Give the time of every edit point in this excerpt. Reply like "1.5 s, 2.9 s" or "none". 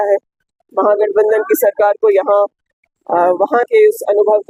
none

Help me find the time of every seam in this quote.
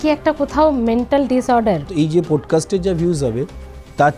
1.9 s

